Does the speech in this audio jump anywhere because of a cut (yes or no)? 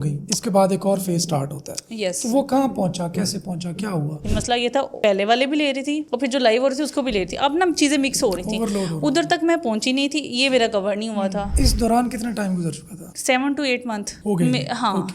yes